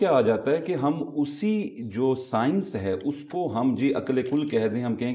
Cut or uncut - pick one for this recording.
uncut